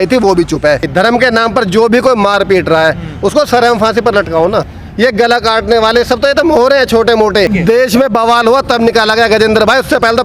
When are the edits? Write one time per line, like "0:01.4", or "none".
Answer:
0:00.9
0:04.8
0:07.5